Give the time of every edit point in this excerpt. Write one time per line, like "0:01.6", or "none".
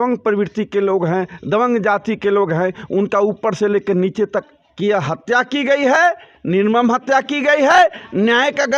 0:04.5